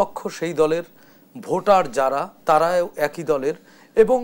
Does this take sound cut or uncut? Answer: uncut